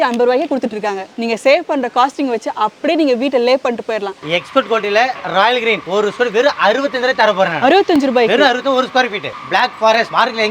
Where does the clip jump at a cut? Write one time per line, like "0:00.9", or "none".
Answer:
0:01.1
0:04.2
0:05.8
0:09.3